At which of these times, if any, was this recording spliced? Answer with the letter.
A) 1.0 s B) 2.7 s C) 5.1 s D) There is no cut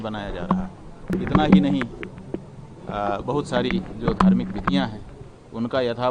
A